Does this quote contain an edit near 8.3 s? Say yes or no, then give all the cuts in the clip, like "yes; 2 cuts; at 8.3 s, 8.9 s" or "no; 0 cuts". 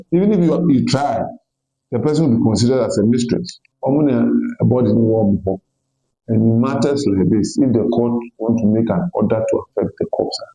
no; 1 cut; at 3.7 s